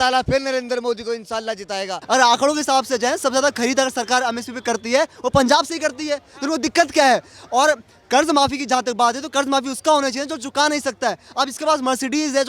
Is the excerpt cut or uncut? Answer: cut